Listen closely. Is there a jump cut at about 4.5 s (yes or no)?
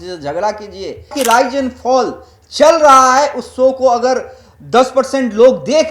no